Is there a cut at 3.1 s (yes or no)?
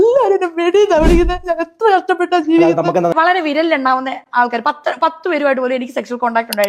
yes